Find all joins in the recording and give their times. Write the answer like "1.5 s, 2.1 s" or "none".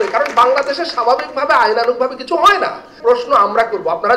2.9 s